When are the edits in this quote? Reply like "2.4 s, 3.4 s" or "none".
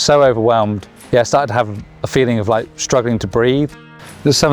0.9 s, 3.7 s